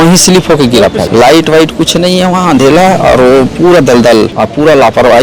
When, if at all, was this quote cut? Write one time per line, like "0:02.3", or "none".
0:01.1
0:04.4